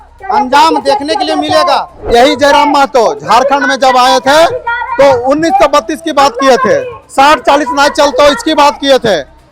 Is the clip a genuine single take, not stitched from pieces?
no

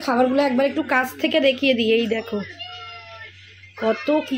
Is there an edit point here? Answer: no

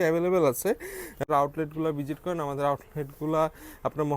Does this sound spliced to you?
yes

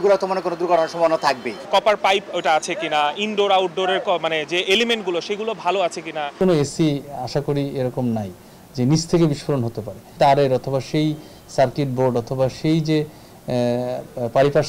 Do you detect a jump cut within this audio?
yes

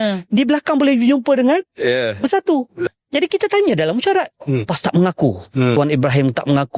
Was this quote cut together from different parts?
yes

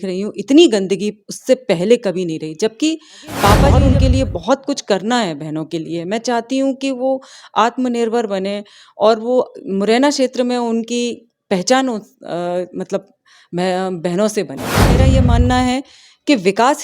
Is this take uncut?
no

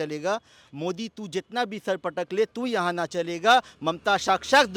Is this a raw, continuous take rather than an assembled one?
yes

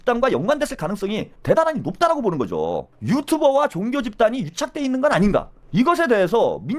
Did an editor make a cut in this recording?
yes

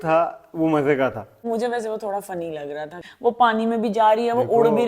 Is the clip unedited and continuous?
no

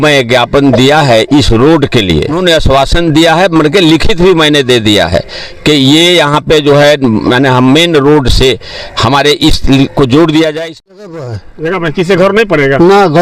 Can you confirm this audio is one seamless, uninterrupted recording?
no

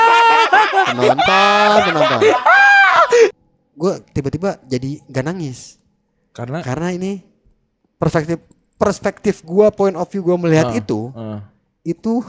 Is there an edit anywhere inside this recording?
yes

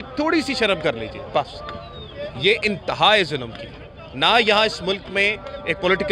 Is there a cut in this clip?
no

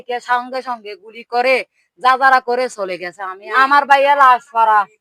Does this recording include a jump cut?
yes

